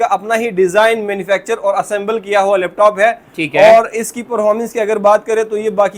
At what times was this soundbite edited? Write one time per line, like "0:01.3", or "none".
none